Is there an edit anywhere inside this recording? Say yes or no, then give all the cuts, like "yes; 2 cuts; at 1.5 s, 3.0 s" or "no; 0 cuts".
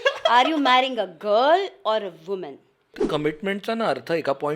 yes; 1 cut; at 3.0 s